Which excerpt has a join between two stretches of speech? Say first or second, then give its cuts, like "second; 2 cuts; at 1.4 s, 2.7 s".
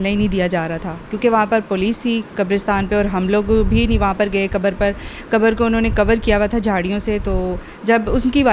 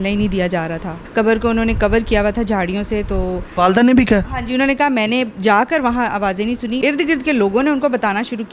second; 3 cuts; at 1.0 s, 3.5 s, 6.8 s